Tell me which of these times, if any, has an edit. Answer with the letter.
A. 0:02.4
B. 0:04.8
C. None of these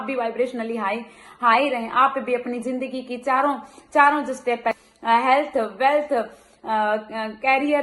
B